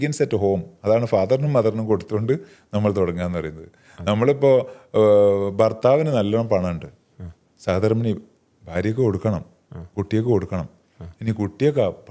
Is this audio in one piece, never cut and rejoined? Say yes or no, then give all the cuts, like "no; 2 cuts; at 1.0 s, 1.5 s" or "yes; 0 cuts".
yes; 0 cuts